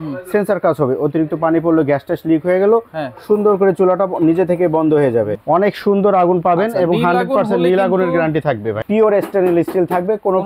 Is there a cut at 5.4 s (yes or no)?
yes